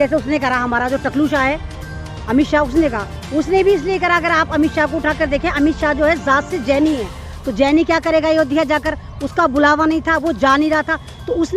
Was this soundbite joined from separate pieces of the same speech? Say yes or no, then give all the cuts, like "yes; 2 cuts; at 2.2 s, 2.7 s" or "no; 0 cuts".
no; 0 cuts